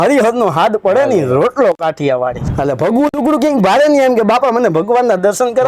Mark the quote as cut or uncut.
cut